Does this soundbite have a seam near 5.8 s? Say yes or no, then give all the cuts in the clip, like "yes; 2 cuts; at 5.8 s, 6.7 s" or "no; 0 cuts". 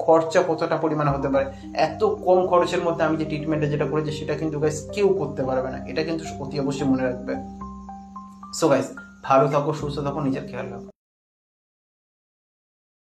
no; 0 cuts